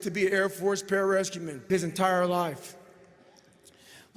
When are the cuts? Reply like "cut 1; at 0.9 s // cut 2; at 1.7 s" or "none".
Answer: cut 1; at 1.7 s